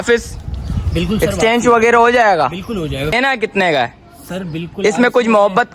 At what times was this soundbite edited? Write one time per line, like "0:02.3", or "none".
0:03.2